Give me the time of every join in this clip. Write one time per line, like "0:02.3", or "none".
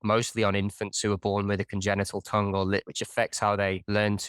0:02.9